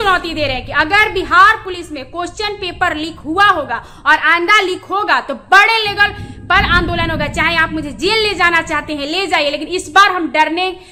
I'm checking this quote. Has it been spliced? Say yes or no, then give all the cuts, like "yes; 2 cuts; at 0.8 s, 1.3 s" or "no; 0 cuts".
no; 0 cuts